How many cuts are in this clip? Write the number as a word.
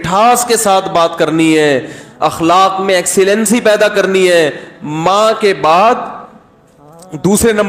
zero